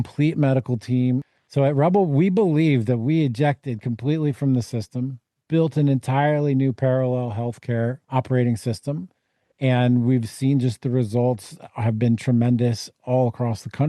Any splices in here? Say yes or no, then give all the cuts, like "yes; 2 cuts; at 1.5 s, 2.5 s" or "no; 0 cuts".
yes; 2 cuts; at 1.4 s, 8.0 s